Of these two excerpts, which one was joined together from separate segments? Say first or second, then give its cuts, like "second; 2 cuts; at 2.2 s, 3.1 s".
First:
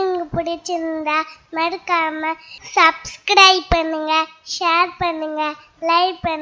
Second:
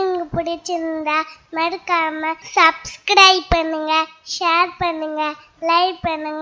second; 1 cut; at 2.4 s